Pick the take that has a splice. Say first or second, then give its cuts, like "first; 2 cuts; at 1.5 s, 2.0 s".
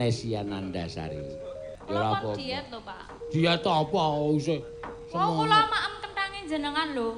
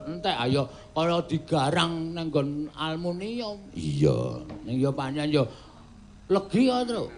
first; 1 cut; at 1.7 s